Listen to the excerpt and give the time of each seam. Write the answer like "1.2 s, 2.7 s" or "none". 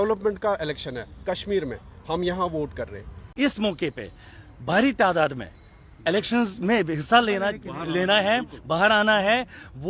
3.2 s